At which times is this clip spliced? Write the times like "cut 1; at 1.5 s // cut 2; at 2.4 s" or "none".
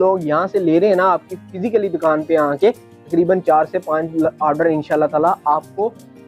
none